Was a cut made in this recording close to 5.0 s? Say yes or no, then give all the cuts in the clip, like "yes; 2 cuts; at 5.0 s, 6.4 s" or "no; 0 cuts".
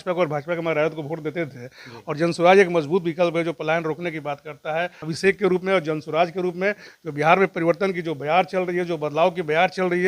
yes; 1 cut; at 5.0 s